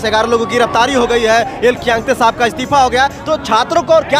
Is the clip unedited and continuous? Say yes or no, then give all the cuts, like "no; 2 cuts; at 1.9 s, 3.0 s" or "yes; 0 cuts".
yes; 0 cuts